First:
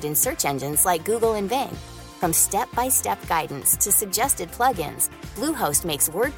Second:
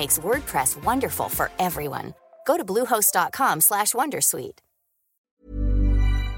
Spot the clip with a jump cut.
second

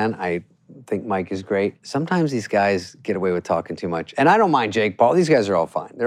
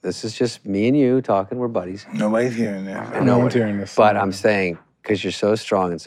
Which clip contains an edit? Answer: first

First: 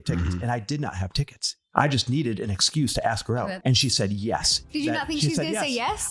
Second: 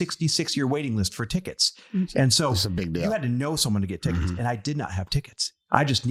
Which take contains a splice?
first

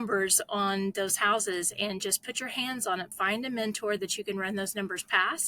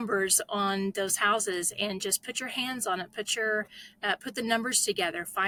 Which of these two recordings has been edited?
first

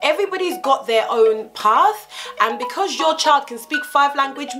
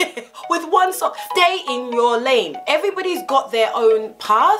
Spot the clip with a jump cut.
second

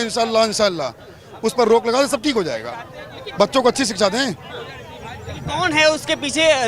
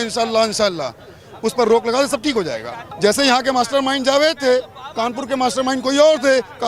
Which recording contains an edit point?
second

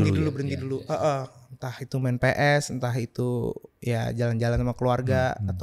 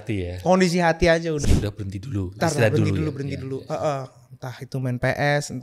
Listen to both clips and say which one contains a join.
second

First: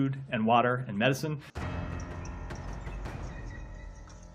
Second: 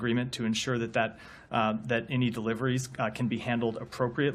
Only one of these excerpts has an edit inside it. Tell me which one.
first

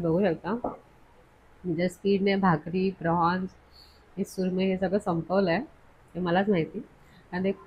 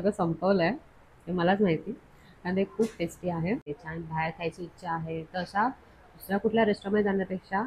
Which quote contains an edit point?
second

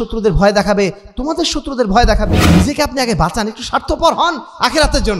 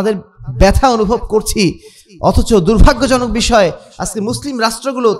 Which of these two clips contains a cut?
first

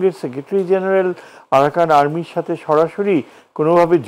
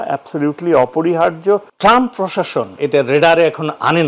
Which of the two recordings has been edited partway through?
second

